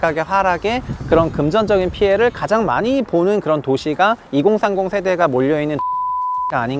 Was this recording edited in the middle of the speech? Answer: no; 0 cuts

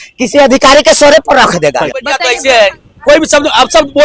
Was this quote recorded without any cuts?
no; 1 cut; at 2.2 s

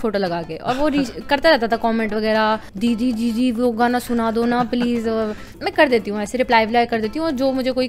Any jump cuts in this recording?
yes; 2 cuts; at 2.7 s, 5.5 s

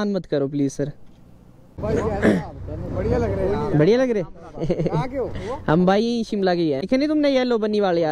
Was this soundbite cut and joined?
yes; 2 cuts; at 1.8 s, 6.9 s

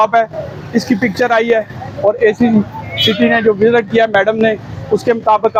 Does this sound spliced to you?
no; 0 cuts

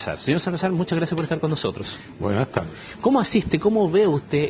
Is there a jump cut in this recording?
yes; 1 cut; at 2.1 s

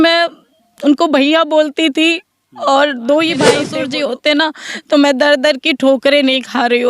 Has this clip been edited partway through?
yes; 1 cut; at 3.7 s

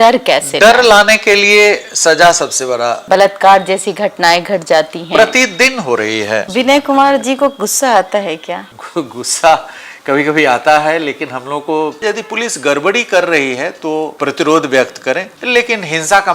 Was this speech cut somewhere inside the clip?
yes; 5 cuts; at 3.0 s, 6.5 s, 8.7 s, 12.0 s, 14.1 s

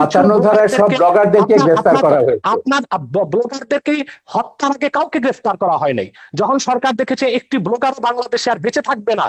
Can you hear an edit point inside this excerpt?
no; 0 cuts

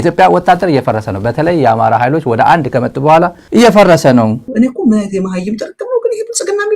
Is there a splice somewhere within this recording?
yes; 1 cut; at 4.4 s

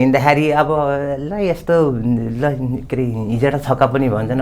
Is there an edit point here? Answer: no; 0 cuts

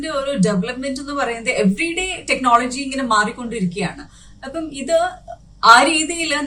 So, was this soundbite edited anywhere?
no; 0 cuts

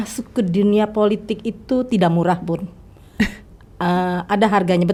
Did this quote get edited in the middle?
no; 0 cuts

